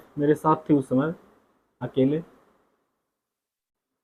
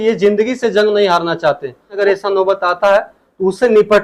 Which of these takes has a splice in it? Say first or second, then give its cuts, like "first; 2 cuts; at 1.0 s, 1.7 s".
second; 1 cut; at 1.9 s